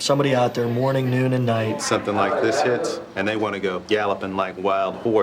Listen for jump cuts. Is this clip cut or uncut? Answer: cut